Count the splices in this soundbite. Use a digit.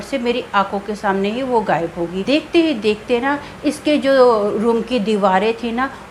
1